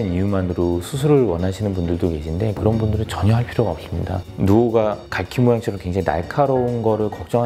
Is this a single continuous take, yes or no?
no